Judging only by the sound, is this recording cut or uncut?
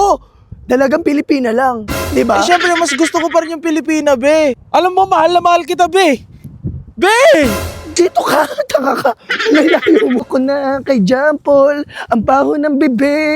cut